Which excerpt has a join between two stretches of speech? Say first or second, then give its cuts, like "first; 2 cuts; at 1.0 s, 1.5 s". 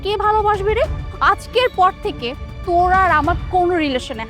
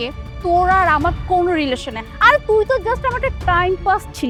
first; 1 cut; at 1.1 s